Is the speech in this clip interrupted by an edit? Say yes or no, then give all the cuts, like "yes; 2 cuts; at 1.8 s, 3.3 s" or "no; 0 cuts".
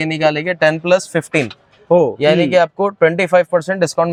no; 0 cuts